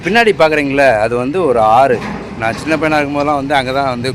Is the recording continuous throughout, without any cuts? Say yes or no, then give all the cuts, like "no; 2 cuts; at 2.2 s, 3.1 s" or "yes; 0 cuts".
yes; 0 cuts